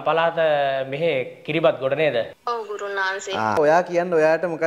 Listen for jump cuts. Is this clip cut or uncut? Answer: cut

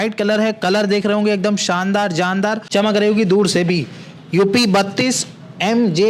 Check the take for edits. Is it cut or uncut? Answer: uncut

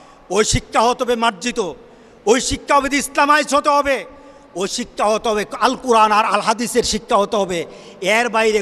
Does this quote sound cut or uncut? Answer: uncut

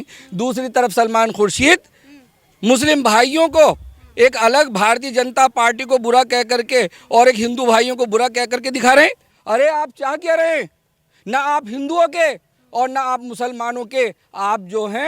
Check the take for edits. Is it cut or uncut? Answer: cut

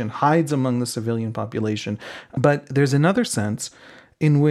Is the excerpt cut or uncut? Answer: cut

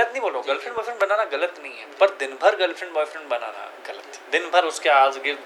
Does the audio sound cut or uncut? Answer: uncut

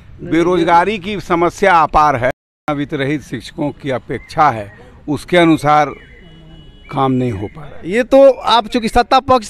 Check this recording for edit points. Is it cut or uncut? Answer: cut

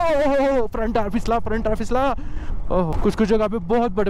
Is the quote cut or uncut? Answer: cut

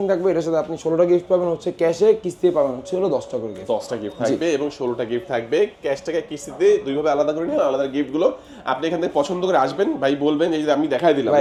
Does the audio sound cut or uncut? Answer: uncut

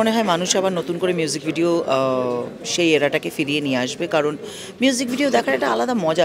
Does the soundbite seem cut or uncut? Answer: uncut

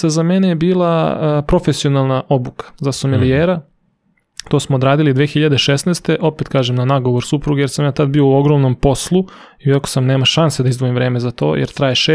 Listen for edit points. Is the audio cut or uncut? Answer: uncut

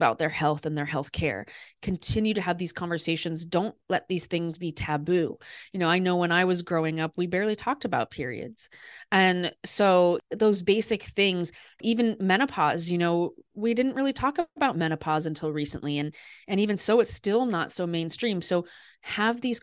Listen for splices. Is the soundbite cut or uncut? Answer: cut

